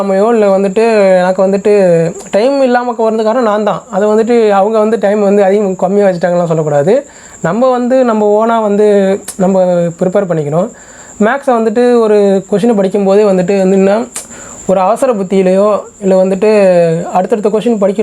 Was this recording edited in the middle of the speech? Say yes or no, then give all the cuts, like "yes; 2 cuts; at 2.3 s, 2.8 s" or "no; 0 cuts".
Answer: no; 0 cuts